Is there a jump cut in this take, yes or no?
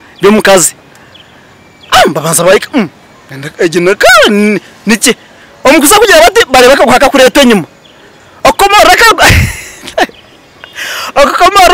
no